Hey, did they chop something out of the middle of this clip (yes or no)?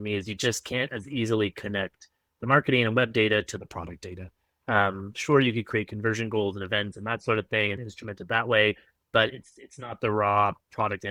no